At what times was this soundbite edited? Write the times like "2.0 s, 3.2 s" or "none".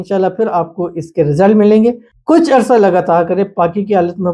2.1 s